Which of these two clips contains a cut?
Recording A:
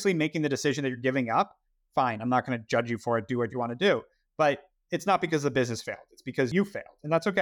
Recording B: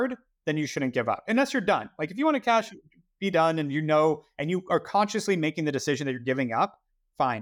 A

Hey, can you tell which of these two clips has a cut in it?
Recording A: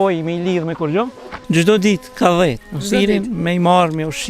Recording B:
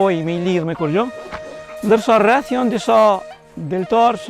A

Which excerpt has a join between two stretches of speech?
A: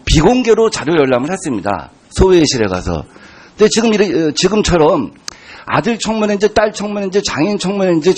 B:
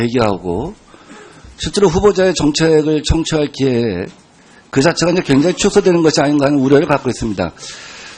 B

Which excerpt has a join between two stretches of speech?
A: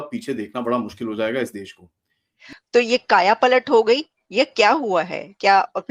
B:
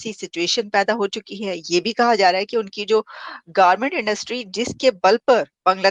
A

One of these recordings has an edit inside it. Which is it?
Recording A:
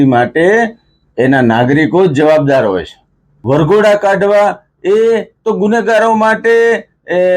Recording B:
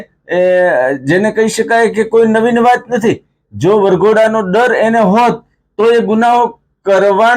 A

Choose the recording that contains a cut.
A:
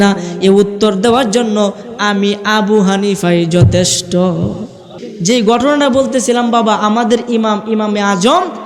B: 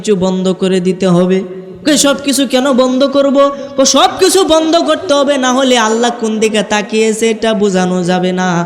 A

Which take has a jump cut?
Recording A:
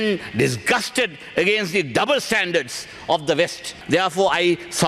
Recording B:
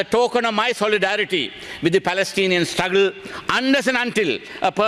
A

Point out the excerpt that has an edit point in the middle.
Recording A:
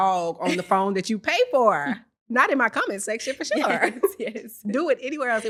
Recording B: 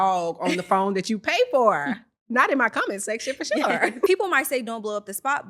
B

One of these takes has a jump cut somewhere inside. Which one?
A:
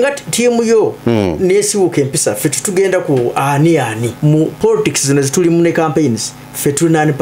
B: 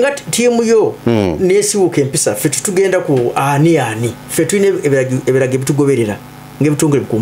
A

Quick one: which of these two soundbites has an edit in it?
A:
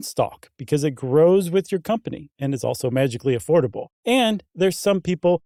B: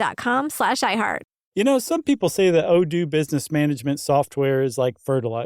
B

